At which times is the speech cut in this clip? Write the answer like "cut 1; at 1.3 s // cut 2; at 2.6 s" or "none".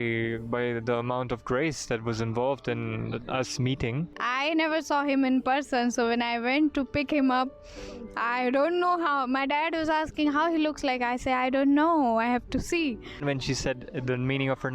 cut 1; at 4.2 s // cut 2; at 13.2 s